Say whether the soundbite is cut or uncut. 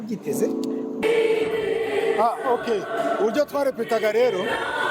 cut